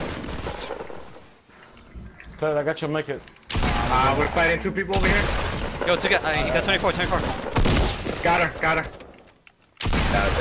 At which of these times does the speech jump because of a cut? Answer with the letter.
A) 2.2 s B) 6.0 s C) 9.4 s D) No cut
D